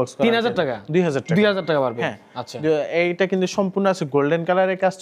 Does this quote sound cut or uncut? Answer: uncut